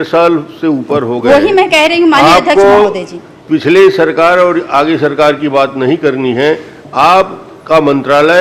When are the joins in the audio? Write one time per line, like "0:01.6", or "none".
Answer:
none